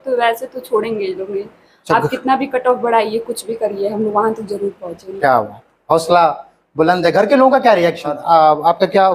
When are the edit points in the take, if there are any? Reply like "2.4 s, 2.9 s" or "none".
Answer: 8.2 s